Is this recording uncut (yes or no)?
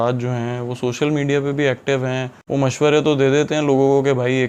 yes